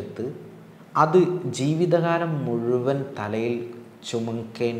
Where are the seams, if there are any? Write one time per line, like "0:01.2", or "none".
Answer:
none